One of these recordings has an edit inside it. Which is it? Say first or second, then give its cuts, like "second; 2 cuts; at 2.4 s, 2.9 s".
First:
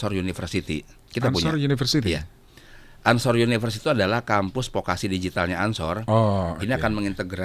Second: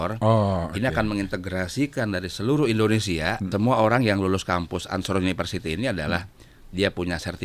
second; 1 cut; at 3.4 s